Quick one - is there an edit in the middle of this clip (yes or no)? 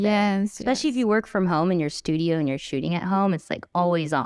no